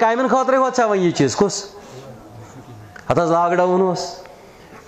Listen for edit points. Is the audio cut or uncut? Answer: uncut